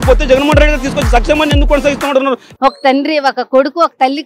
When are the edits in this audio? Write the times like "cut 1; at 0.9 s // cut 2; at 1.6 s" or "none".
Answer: cut 1; at 2.4 s